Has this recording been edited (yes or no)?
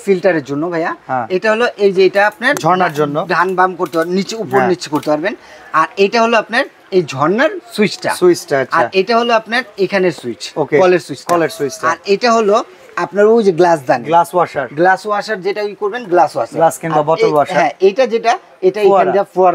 no